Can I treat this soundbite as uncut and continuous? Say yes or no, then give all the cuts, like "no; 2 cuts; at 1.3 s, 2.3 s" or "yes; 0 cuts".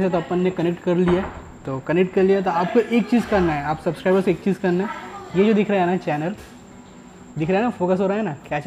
yes; 0 cuts